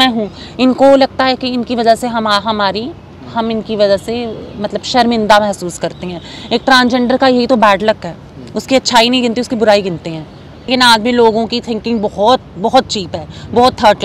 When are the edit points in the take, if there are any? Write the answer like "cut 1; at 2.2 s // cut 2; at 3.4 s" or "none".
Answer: cut 1; at 10.7 s